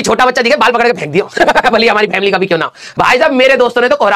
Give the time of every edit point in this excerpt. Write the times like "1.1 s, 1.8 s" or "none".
2.8 s